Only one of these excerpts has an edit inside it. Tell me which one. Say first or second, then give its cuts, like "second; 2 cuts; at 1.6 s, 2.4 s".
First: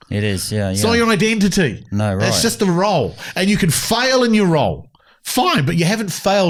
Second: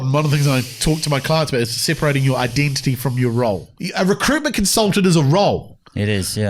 second; 1 cut; at 3.7 s